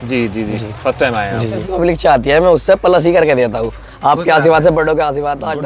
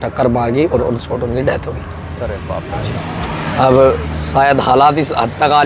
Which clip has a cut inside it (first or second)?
first